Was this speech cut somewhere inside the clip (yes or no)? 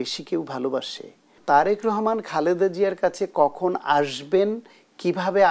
yes